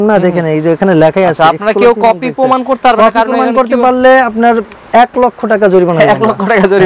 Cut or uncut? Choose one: uncut